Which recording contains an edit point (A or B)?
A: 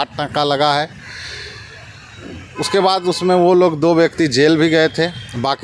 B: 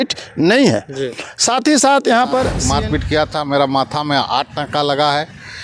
B